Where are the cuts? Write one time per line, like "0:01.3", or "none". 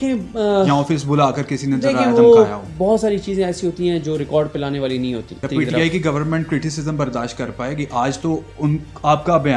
0:05.4